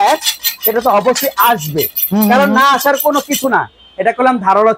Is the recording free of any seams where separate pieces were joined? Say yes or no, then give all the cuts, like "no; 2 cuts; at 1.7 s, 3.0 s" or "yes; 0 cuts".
yes; 0 cuts